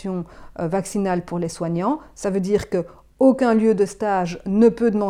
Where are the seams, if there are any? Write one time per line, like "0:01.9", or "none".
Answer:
none